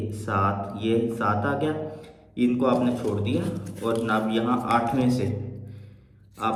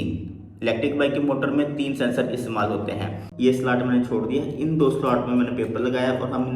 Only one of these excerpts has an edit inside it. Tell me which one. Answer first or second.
second